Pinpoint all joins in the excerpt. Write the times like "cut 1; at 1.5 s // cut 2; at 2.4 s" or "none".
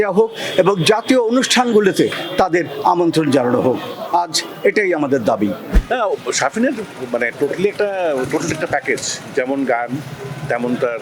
cut 1; at 5.7 s